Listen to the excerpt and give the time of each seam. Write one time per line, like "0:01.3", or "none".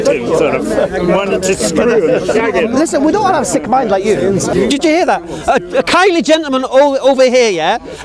0:04.5